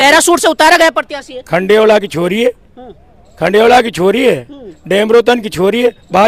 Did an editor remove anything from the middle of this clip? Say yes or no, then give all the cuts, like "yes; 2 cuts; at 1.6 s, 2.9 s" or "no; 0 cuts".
no; 0 cuts